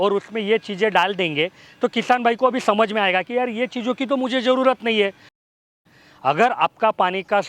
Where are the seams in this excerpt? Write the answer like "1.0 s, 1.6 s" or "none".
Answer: 5.4 s

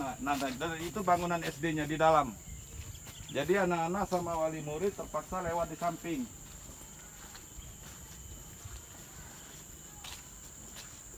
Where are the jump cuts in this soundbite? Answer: none

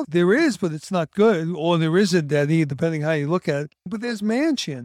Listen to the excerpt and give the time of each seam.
3.9 s

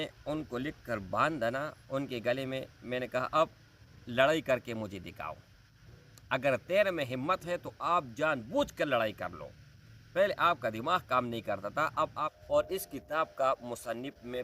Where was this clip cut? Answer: 12.4 s

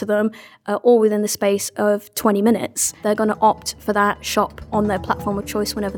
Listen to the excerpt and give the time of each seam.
3.0 s, 4.7 s

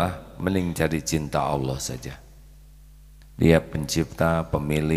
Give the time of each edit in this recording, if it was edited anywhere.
none

